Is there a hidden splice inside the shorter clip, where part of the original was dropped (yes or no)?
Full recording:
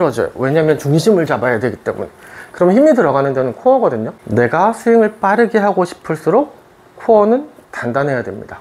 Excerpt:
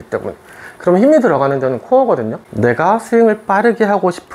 no